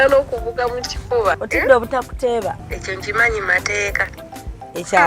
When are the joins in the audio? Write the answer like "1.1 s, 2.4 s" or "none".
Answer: 1.4 s, 2.7 s